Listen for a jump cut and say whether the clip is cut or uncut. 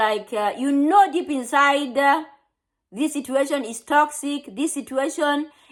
uncut